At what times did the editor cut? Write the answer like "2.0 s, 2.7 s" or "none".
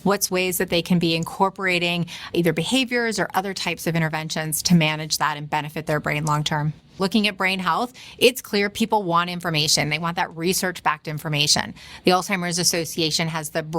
7.0 s